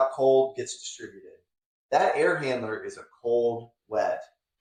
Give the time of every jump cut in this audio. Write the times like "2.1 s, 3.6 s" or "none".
none

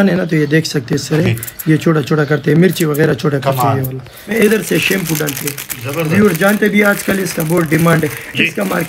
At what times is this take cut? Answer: 4.3 s

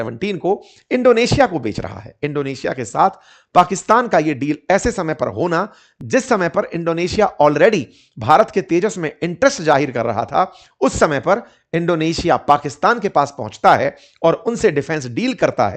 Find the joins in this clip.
none

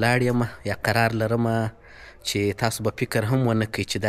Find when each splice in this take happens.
none

